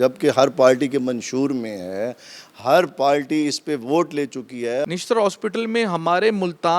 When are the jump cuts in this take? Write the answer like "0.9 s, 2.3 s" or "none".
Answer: 4.9 s